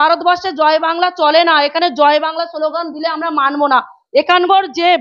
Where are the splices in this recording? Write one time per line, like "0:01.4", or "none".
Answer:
none